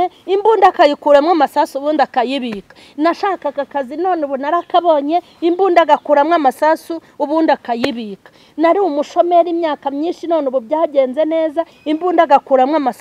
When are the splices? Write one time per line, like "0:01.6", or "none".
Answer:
none